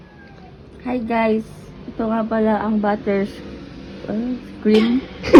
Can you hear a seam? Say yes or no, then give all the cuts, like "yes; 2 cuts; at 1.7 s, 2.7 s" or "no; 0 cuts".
no; 0 cuts